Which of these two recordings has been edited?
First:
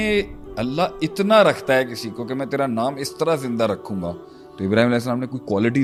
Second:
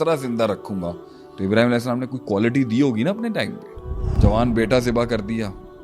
second; 1 cut; at 4.1 s

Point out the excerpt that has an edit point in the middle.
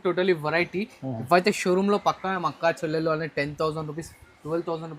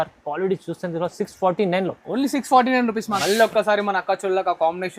second; 1 cut; at 3.2 s

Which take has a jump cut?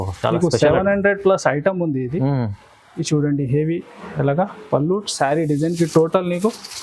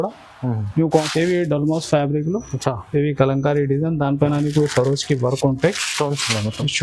second; 1 cut; at 1.1 s

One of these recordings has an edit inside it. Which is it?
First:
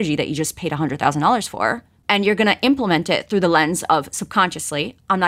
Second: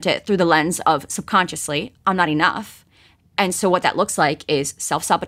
first; 1 cut; at 1.9 s

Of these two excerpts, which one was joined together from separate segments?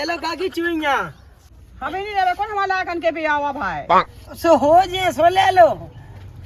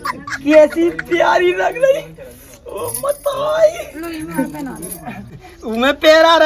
first; 1 cut; at 1.5 s

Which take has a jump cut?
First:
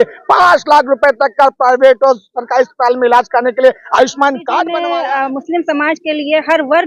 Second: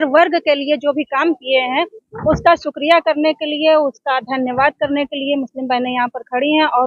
first; 1 cut; at 4.6 s

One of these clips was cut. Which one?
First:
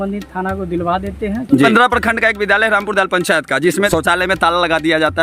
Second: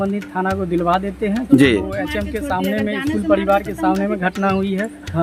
first; 2 cuts; at 1.7 s, 3.9 s

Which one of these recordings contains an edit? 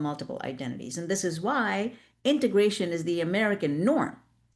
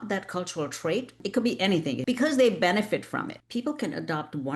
second; 2 cuts; at 1.2 s, 3.4 s

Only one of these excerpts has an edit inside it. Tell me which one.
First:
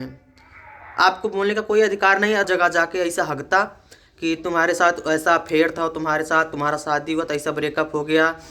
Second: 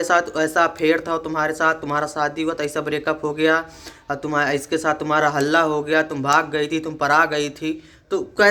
first; 1 cut; at 2.5 s

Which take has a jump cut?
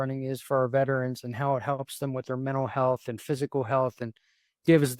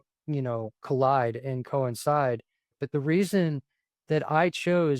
second; 1 cut; at 2.8 s

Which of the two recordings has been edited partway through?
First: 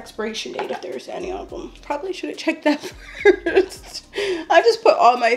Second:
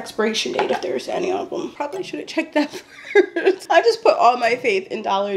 second; 2 cuts; at 1.7 s, 3.6 s

